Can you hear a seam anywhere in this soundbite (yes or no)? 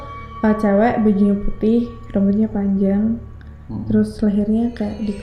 no